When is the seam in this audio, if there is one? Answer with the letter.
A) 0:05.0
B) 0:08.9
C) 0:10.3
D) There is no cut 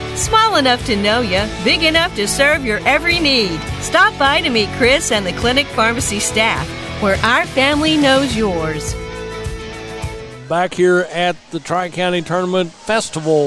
D